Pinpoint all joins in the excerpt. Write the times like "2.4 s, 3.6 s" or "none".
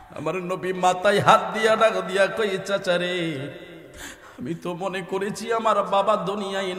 none